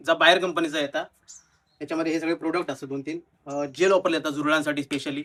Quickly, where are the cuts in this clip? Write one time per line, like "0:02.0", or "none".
none